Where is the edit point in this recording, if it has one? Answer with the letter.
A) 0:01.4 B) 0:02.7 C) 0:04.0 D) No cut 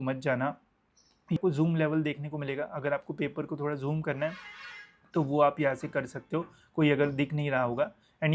A